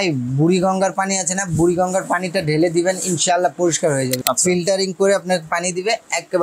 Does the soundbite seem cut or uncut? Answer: cut